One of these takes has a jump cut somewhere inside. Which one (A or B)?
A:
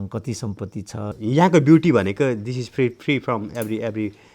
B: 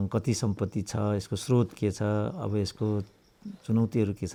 A